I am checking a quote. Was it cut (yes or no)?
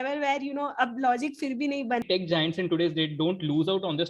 yes